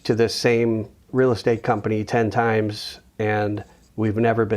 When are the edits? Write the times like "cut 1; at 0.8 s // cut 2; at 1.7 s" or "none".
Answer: cut 1; at 1.0 s